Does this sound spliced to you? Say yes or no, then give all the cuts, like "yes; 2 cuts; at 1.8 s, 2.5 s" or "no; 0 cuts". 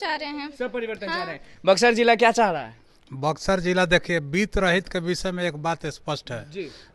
no; 0 cuts